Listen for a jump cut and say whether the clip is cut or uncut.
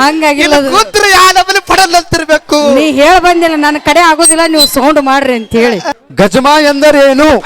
cut